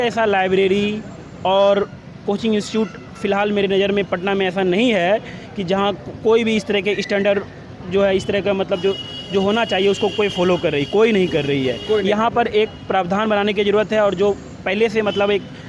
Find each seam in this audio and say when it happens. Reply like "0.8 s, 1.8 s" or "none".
none